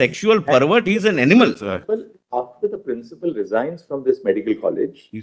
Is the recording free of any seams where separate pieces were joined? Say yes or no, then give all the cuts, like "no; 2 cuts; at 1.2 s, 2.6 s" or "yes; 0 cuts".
no; 1 cut; at 1.8 s